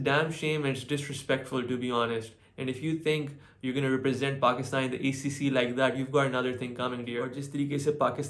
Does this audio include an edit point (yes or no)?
yes